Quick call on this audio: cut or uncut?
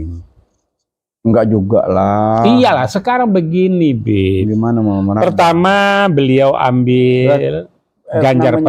uncut